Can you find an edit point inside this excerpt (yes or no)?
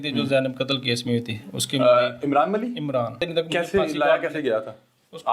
yes